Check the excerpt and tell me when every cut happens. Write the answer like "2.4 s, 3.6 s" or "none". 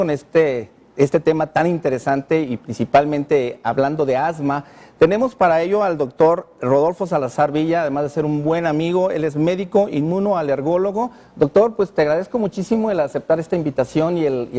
9.6 s

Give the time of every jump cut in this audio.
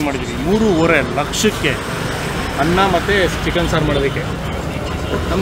none

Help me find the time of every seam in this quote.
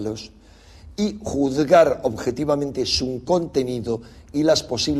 3.3 s

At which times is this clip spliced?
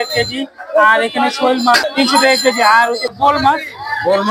1.9 s, 3.1 s

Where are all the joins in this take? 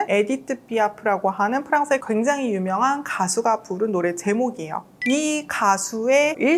5.0 s

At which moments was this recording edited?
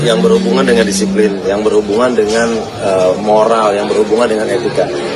none

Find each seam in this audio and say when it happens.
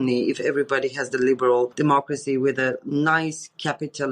1.7 s

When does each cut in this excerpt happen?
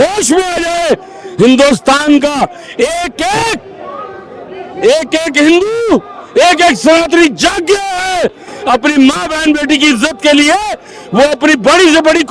none

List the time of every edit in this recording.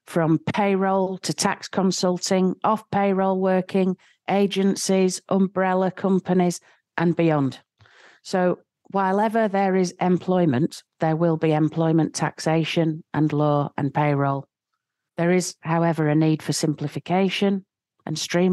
none

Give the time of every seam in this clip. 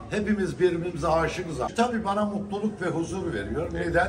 1.6 s

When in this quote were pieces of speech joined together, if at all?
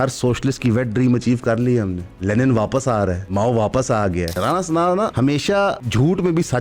2.1 s, 3.2 s, 4.4 s, 5.5 s

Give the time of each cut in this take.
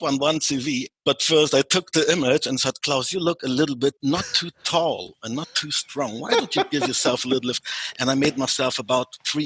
0.9 s, 4.0 s

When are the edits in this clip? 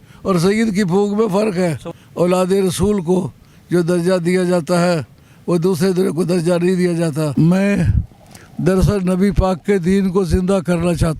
1.9 s, 7.3 s

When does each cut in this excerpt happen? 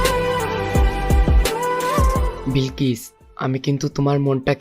2.4 s

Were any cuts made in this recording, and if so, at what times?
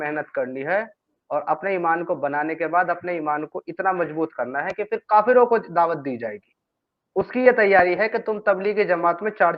none

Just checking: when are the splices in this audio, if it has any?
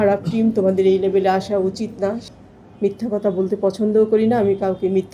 2.2 s

